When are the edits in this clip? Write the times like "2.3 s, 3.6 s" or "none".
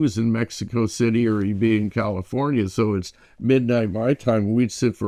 none